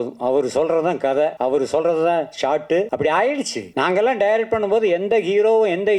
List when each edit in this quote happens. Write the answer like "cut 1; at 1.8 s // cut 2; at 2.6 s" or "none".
cut 1; at 1.4 s // cut 2; at 2.9 s // cut 3; at 3.6 s